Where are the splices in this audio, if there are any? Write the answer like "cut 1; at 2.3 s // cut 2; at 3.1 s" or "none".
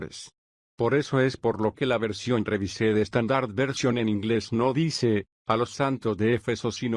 none